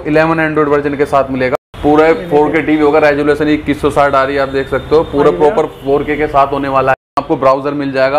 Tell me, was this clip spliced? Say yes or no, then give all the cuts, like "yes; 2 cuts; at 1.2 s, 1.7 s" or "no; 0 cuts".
yes; 2 cuts; at 1.5 s, 6.9 s